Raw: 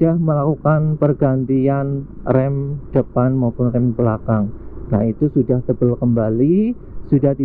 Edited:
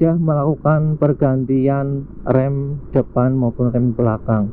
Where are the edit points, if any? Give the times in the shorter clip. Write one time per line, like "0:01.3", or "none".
none